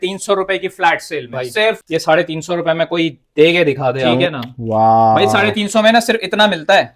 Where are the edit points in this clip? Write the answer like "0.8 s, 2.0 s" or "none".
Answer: 1.8 s, 4.2 s